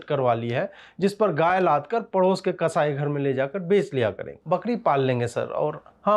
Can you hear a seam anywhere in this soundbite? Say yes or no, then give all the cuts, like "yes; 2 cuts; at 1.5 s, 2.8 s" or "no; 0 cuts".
yes; 1 cut; at 4.3 s